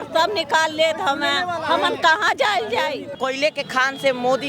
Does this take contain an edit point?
yes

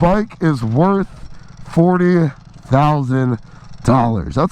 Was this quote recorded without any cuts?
yes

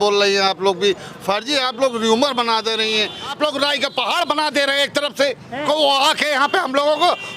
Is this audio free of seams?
no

